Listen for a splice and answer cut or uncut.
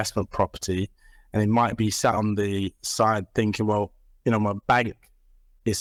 uncut